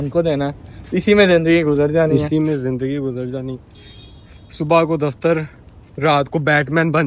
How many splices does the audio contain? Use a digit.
0